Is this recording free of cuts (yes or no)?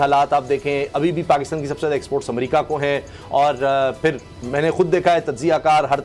yes